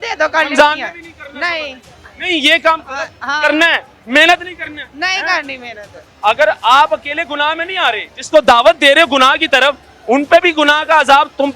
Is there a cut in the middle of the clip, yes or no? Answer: yes